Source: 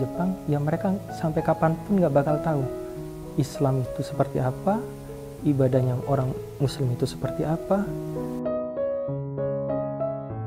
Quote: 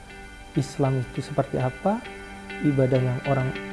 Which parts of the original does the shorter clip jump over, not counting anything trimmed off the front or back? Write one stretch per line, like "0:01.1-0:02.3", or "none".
none